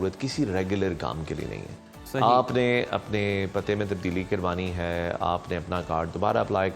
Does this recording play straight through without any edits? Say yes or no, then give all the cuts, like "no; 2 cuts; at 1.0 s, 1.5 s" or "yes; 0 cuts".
yes; 0 cuts